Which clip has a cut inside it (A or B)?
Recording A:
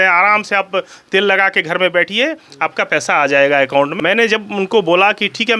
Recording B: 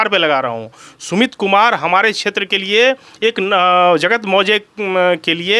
A